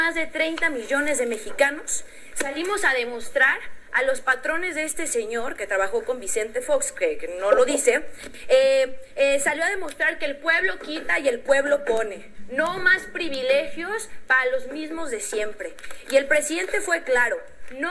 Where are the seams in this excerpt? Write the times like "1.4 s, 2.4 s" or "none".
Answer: none